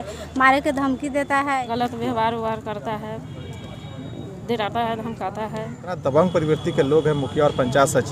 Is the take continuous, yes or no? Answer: no